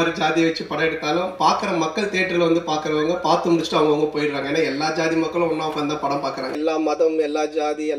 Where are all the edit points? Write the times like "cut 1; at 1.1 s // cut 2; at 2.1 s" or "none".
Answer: cut 1; at 6.6 s